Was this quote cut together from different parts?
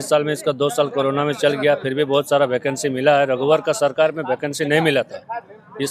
no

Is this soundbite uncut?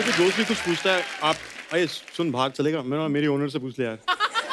yes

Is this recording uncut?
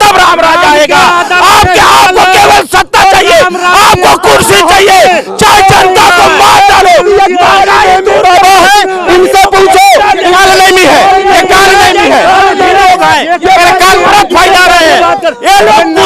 yes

